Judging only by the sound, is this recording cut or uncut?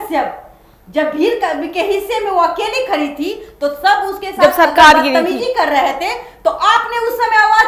uncut